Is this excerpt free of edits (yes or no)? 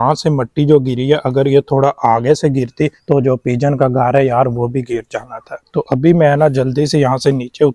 yes